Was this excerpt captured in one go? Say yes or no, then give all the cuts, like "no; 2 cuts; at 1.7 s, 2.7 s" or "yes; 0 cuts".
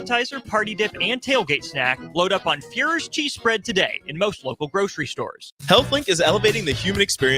no; 1 cut; at 5.5 s